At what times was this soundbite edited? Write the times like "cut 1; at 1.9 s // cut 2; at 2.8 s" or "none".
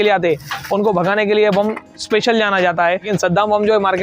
cut 1; at 3.1 s